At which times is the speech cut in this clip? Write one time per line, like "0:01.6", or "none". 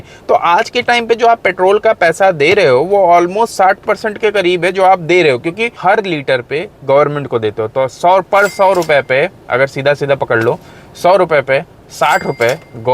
0:05.7